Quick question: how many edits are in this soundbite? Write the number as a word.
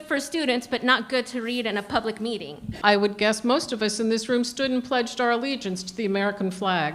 one